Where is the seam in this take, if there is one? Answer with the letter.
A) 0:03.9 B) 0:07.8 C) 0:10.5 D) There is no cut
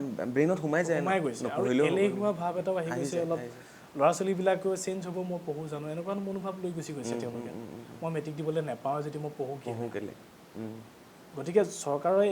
D